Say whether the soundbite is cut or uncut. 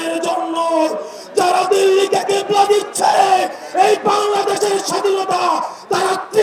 uncut